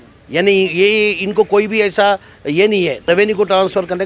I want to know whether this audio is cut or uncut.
cut